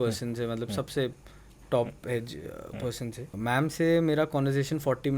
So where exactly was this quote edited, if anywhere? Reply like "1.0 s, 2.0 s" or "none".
3.3 s

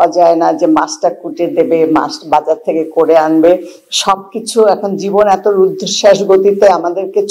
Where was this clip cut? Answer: none

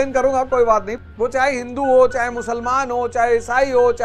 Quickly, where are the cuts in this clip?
0.9 s

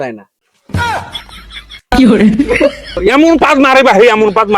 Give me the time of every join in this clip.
2.9 s

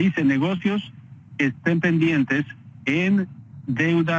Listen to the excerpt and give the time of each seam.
none

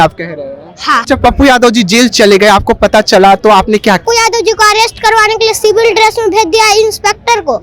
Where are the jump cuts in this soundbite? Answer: 0.9 s, 4.0 s

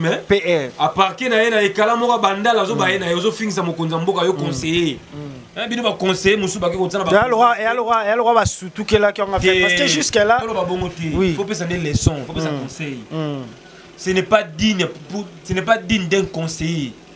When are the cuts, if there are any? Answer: none

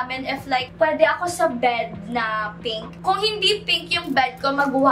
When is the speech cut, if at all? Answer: 0.8 s, 3.0 s

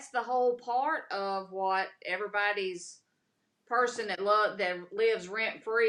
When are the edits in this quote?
none

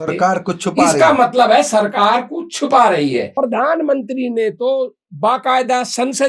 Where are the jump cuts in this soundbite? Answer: 3.3 s

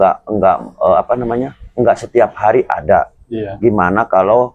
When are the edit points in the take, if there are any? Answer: none

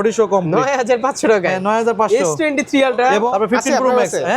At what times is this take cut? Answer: 3.3 s

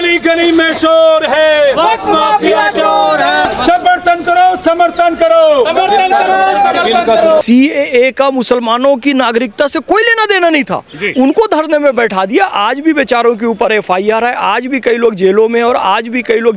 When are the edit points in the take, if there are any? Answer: 3.5 s, 7.4 s

